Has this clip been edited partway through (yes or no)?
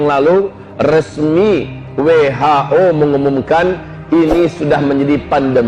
no